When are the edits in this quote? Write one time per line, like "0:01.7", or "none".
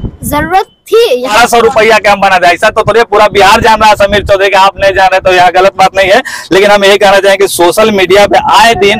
0:01.3